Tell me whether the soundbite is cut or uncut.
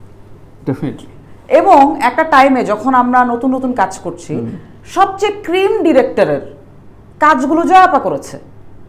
uncut